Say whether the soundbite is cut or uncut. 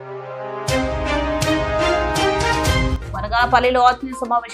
cut